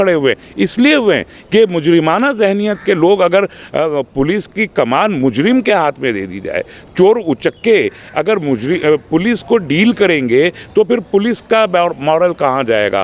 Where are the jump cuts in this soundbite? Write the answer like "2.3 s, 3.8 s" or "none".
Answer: none